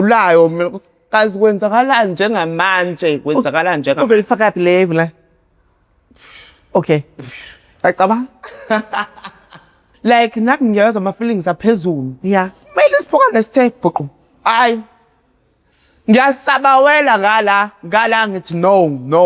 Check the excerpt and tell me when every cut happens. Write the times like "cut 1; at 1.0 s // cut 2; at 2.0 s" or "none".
cut 1; at 9.8 s